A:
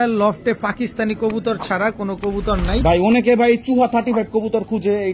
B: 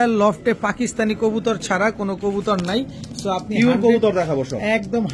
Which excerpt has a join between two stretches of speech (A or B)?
A